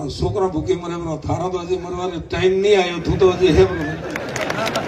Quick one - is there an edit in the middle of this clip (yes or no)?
no